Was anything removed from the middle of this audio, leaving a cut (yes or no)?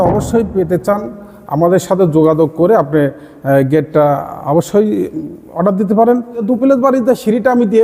yes